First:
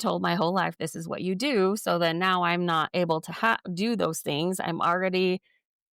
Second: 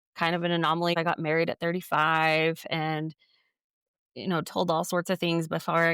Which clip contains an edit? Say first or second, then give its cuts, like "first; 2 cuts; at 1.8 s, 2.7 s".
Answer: second; 1 cut; at 1.0 s